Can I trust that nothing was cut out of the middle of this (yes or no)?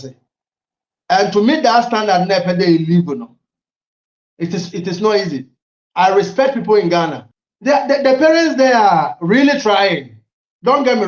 no